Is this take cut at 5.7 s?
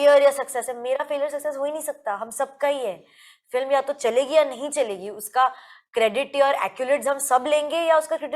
no; 0 cuts

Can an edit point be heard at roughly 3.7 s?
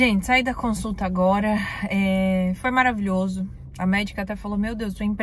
no; 0 cuts

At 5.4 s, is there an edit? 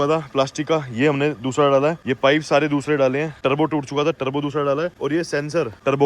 yes; 3 cuts; at 2.1 s, 3.4 s, 5.4 s

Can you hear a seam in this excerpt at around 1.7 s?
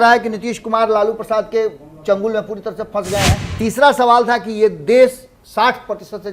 no; 1 cut; at 3.4 s

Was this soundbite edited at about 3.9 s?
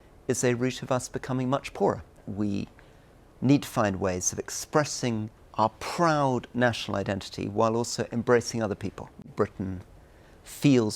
no; 3 cuts; at 2.2 s, 5.4 s, 9.3 s

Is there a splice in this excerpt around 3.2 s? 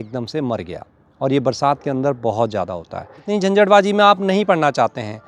yes; 1 cut; at 3.2 s

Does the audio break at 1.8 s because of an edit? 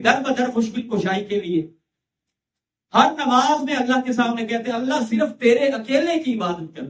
no; 0 cuts

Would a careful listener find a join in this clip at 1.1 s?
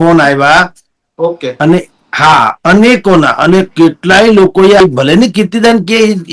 no; 1 cut; at 4.8 s

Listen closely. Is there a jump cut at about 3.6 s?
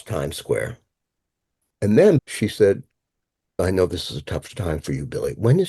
yes; 2 cuts; at 2.2 s, 3.6 s

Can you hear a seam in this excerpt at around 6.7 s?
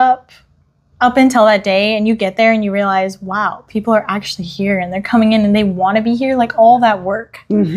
no; 0 cuts

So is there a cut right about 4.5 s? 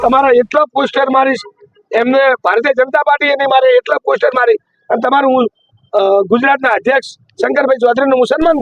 no; 0 cuts

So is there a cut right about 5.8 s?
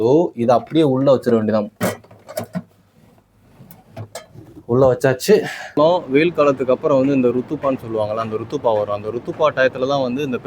yes; 1 cut; at 5.8 s

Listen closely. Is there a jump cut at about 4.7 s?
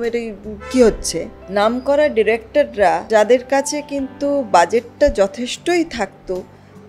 no; 2 cuts; at 1.3 s, 3.0 s

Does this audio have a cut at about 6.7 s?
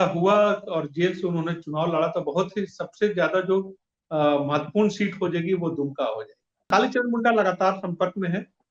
yes; 1 cut; at 6.7 s

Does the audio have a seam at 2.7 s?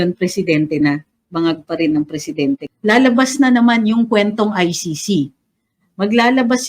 yes; 1 cut; at 2.7 s

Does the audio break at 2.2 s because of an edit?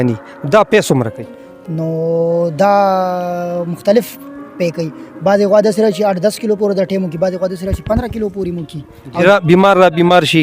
no; 1 cut; at 9.2 s

